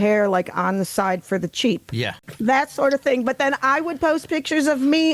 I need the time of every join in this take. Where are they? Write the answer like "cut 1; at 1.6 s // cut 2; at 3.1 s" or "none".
cut 1; at 2.2 s